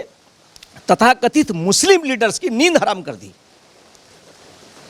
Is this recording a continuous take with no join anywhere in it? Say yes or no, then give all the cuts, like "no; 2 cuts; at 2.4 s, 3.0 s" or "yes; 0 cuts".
yes; 0 cuts